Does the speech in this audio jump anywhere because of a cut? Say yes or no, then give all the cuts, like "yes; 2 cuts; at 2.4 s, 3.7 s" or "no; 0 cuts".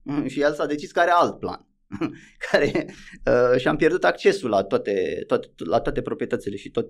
no; 0 cuts